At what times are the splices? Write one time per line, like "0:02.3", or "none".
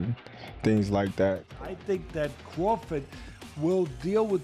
0:01.5

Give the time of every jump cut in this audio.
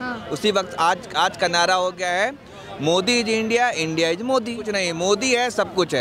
0:04.7

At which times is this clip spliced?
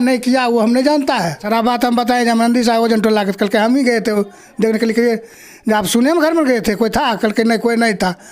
0:01.4

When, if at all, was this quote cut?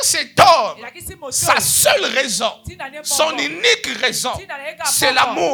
none

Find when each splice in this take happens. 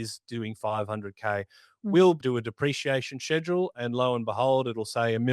0:02.2

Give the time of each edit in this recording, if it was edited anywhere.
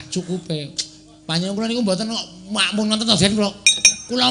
none

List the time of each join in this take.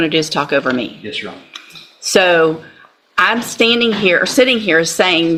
none

